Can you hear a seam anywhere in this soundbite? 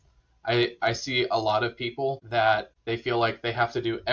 yes; 2 cuts; at 2.2 s, 2.7 s

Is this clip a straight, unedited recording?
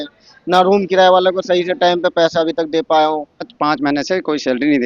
no; 1 cut; at 3.5 s

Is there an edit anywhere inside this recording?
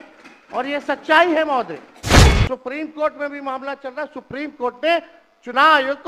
yes; 1 cut; at 2.3 s

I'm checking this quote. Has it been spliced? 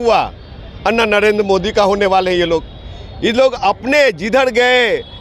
no; 0 cuts

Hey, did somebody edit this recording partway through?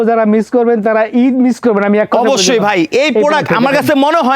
no; 0 cuts

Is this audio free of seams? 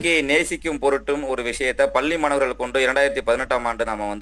yes; 0 cuts

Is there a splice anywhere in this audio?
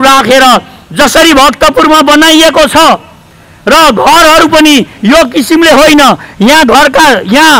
no; 0 cuts

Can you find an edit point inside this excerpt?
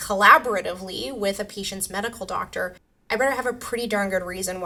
no; 0 cuts

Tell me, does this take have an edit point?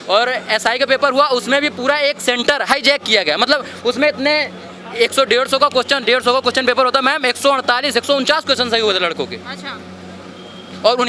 no; 0 cuts

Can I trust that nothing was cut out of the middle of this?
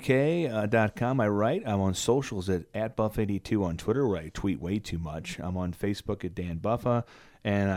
yes; 0 cuts

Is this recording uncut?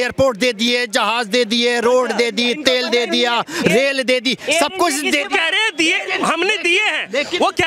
yes; 0 cuts

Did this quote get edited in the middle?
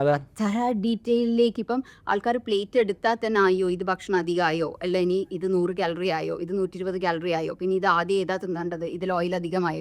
no; 0 cuts

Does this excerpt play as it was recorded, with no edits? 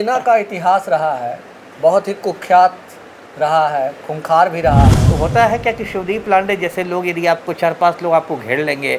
no; 1 cut; at 5.0 s

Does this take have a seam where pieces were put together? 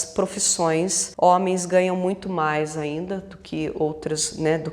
yes; 1 cut; at 1.0 s

